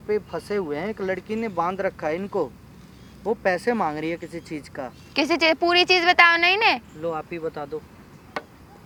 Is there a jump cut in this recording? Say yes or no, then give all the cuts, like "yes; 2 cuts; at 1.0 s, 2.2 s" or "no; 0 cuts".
no; 0 cuts